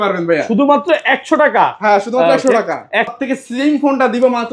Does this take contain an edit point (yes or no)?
yes